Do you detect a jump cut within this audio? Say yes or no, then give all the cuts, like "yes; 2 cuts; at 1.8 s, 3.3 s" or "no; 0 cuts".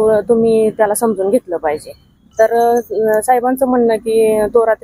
yes; 1 cut; at 2.2 s